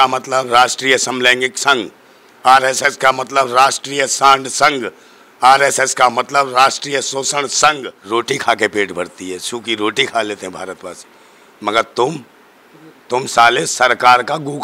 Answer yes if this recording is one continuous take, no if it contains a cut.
no